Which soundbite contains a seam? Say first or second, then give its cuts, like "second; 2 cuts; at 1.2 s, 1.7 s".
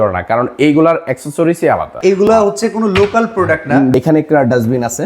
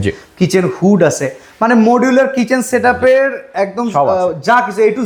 first; 2 cuts; at 1.9 s, 3.9 s